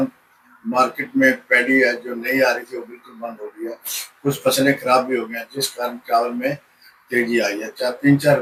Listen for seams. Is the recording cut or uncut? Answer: uncut